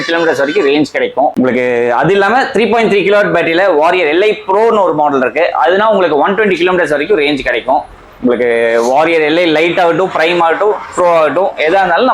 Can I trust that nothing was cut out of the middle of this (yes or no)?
yes